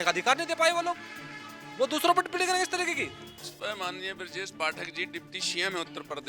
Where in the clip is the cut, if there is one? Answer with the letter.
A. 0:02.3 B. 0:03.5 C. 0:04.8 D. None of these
B